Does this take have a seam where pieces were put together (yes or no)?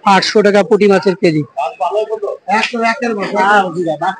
no